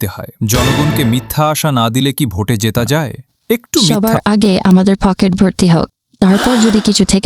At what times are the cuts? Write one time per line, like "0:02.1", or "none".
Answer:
0:03.9